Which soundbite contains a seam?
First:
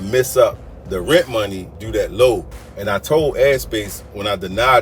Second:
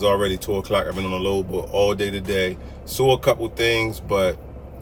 first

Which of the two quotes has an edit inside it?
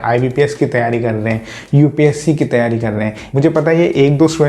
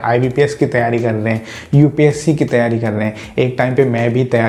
first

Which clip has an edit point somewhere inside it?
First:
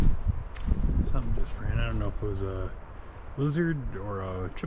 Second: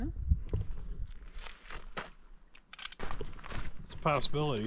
second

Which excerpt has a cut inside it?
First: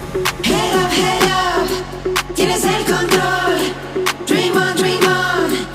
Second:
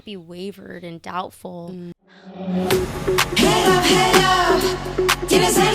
second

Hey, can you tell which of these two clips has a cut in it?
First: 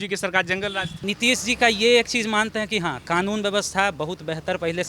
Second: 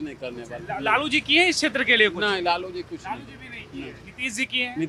first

